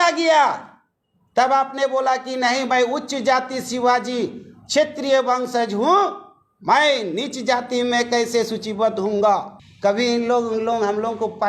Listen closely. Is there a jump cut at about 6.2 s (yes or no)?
no